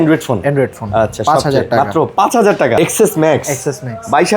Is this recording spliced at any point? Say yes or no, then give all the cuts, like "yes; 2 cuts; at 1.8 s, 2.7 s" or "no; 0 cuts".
yes; 1 cut; at 2.8 s